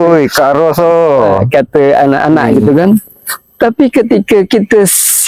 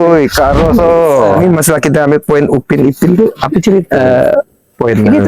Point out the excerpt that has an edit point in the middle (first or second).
second